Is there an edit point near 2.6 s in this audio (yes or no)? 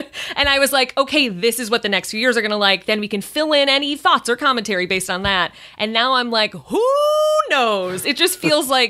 no